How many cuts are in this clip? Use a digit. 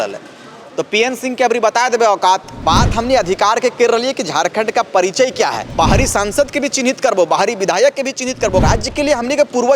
3